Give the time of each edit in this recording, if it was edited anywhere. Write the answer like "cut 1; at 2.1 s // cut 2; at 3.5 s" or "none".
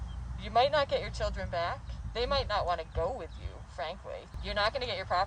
cut 1; at 4.3 s